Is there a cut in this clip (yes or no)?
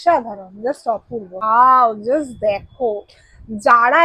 yes